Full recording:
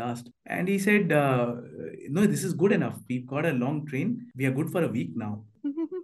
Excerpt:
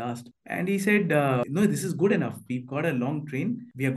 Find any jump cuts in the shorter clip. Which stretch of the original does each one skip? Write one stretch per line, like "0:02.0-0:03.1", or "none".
0:01.5-0:02.1

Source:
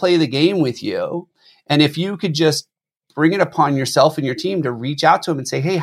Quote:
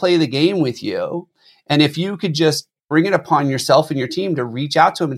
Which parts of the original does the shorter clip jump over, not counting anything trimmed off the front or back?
0:02.7-0:03.0

